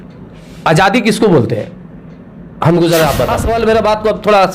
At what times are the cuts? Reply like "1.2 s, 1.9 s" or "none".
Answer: 3.4 s